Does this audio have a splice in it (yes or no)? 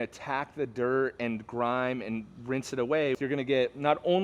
yes